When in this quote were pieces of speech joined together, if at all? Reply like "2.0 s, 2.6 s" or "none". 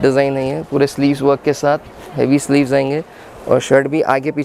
none